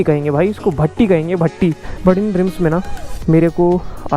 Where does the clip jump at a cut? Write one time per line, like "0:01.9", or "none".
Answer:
0:01.8